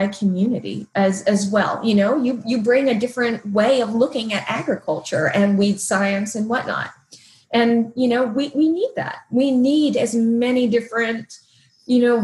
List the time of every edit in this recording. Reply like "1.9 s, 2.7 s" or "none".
none